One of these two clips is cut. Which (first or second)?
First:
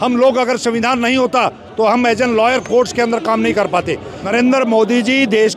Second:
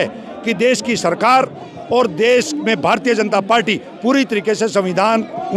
first